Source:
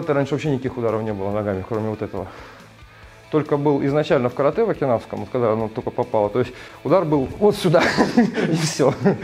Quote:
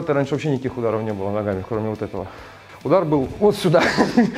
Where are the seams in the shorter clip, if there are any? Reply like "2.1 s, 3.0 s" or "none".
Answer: 2.7 s